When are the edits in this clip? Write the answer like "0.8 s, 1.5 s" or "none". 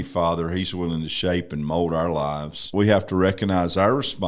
2.6 s